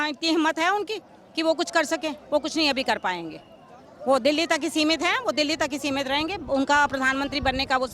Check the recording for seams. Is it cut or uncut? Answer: uncut